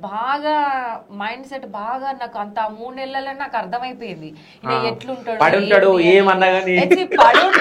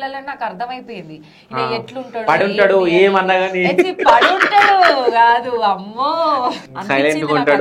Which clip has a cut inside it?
second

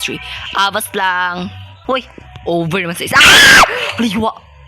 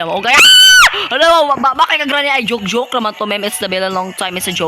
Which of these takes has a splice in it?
first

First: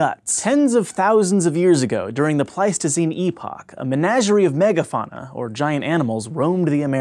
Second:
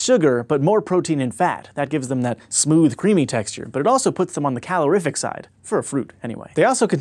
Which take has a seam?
second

